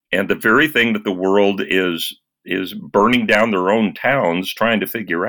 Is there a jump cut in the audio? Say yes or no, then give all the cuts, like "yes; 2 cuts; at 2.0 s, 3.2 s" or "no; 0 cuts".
no; 0 cuts